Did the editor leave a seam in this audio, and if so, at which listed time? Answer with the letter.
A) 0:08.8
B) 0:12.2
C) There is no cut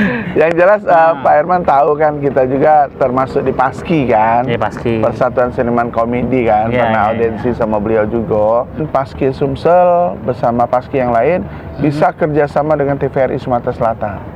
A